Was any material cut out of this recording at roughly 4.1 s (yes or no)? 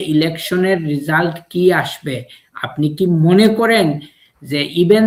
no